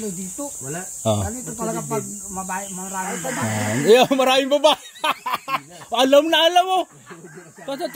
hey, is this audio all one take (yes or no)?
yes